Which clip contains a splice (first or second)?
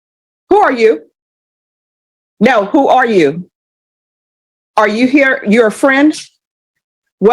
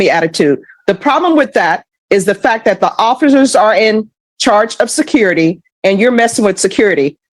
first